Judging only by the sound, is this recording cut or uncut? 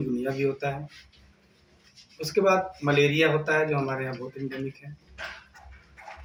uncut